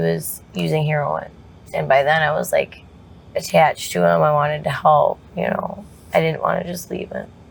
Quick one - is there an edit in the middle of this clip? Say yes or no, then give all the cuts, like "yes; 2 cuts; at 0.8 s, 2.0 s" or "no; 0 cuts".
no; 0 cuts